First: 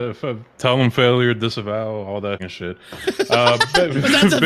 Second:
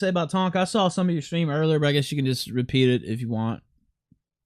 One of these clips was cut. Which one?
first; 1 cut; at 2.4 s

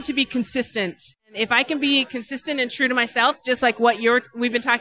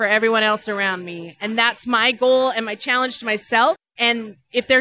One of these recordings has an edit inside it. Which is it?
first; 1 cut; at 1.3 s

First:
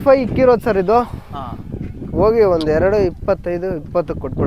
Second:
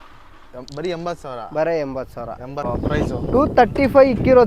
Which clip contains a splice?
second; 1 cut; at 2.7 s

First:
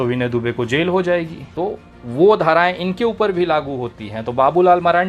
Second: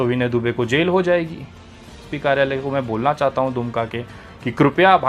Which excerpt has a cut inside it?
first; 1 cut; at 1.4 s

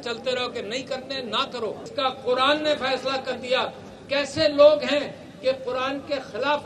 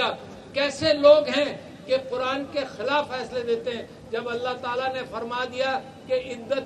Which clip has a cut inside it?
first; 1 cut; at 1.9 s

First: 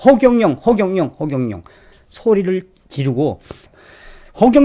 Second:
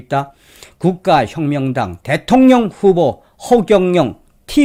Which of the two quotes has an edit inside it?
first; 1 cut; at 3.7 s

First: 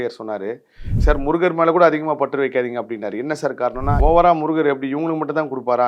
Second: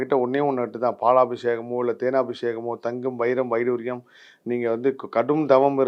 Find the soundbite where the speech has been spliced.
first; 2 cuts; at 1.0 s, 4.0 s

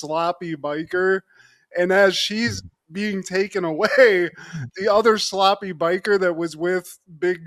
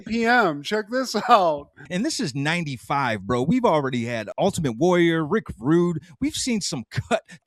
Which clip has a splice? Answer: second; 1 cut; at 1.8 s

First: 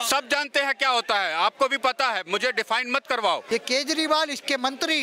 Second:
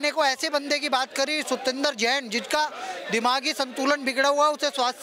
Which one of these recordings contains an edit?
first; 1 cut; at 3.4 s

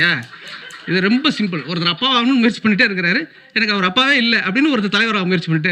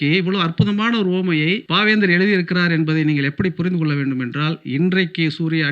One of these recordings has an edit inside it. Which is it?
second; 1 cut; at 1.6 s

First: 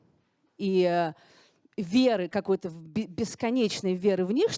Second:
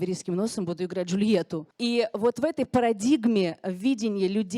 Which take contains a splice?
second; 1 cut; at 1.6 s

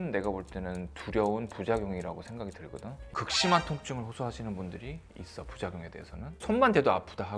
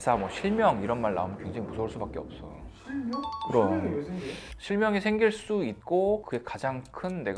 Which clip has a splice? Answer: first; 1 cut; at 3.0 s

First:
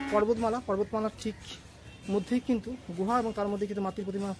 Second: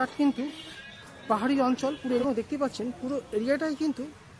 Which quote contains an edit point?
second; 1 cut; at 2.2 s

